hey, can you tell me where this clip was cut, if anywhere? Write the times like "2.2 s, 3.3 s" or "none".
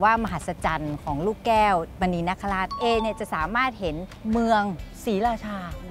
2.7 s, 4.1 s, 4.9 s